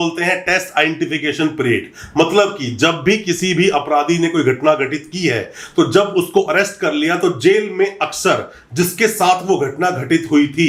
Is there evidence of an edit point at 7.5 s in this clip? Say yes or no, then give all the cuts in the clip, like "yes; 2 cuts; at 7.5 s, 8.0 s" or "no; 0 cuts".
no; 0 cuts